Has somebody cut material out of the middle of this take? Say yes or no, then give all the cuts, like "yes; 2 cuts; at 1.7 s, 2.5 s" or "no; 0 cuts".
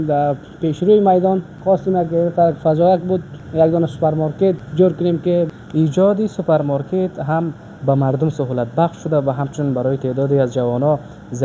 yes; 4 cuts; at 1.5 s, 3.4 s, 4.6 s, 5.5 s